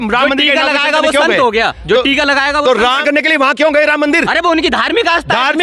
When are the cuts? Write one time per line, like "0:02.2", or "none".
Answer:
0:03.0